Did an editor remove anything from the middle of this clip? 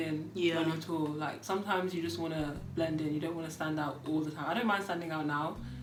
no; 0 cuts

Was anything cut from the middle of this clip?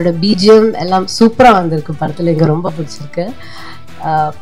no; 0 cuts

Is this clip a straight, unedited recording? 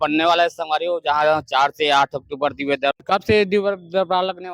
no; 1 cut; at 2.9 s

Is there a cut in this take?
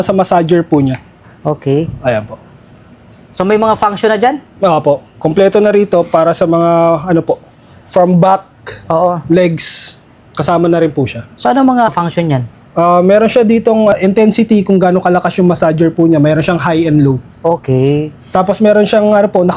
no; 0 cuts

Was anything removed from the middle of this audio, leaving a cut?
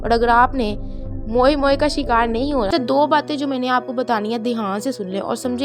yes; 1 cut; at 2.7 s

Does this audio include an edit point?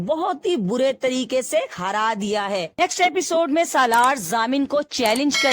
yes; 1 cut; at 2.8 s

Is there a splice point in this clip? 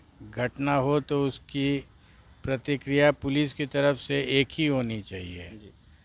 no; 0 cuts

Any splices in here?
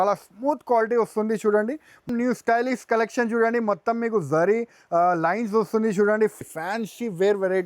yes; 2 cuts; at 2.1 s, 6.4 s

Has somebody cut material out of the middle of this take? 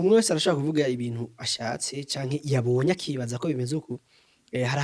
no; 0 cuts

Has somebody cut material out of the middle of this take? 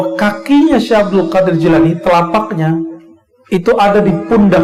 no; 0 cuts

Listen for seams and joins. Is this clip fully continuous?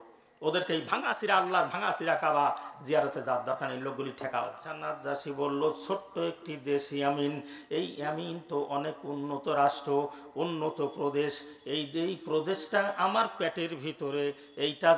no; 1 cut; at 4.9 s

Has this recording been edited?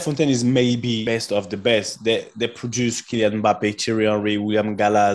yes; 1 cut; at 1.0 s

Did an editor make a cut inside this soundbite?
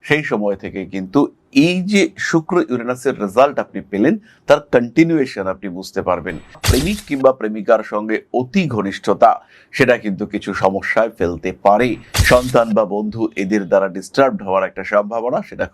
yes; 2 cuts; at 6.6 s, 12.1 s

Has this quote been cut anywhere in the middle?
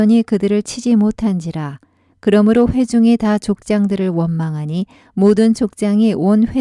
yes; 1 cut; at 5.0 s

